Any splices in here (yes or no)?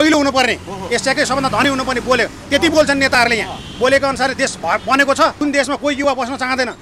yes